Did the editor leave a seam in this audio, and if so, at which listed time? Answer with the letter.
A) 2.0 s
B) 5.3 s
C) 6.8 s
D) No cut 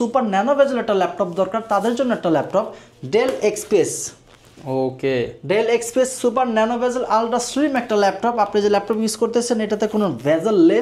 D